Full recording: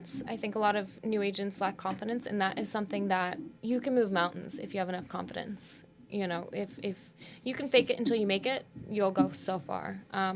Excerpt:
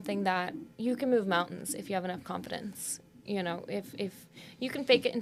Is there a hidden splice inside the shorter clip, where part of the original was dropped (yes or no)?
no